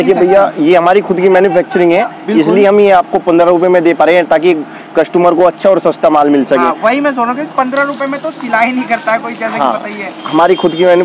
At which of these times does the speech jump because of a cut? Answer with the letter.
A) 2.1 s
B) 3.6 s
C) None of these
C